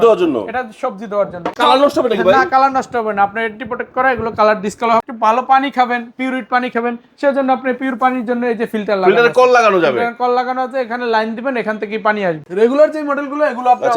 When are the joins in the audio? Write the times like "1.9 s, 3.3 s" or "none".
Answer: 1.5 s, 5.0 s, 12.4 s